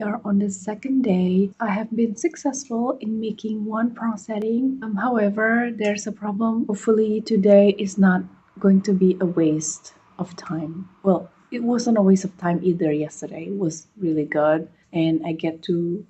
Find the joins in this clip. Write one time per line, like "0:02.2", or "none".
0:01.5
0:04.8
0:06.7